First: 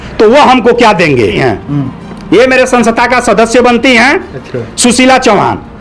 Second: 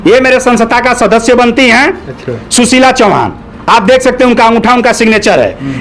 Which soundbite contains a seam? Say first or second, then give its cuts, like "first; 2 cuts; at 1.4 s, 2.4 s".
first; 1 cut; at 1.4 s